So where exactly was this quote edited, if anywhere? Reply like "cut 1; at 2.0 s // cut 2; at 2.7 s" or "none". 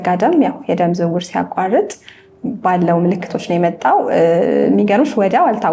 none